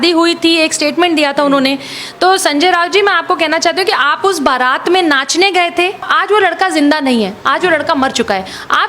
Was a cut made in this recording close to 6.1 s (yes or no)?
yes